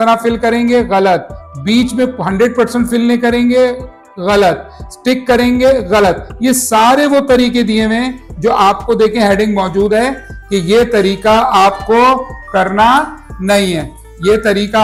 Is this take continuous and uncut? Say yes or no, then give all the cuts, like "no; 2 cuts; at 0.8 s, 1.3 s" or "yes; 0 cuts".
yes; 0 cuts